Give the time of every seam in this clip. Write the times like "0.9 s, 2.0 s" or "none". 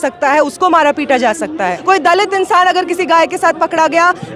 1.8 s